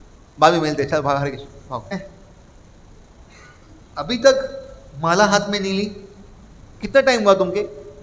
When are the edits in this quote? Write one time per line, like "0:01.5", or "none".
0:01.9